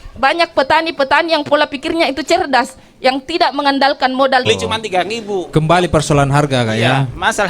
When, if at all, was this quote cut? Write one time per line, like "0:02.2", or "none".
0:04.5